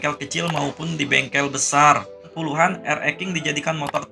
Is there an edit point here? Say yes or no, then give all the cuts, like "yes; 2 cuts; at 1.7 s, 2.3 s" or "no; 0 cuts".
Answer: yes; 1 cut; at 2.3 s